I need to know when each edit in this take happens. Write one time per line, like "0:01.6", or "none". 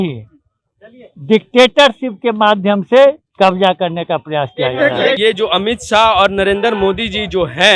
0:05.2